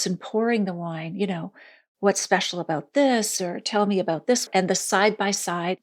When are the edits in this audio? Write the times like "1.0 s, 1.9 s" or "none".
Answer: none